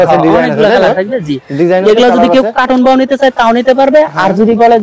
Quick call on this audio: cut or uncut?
uncut